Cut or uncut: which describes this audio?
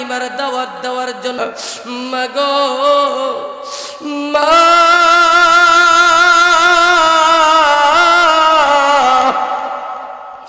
cut